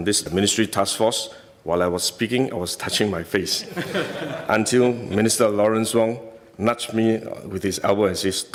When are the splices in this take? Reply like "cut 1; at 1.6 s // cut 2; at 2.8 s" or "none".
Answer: none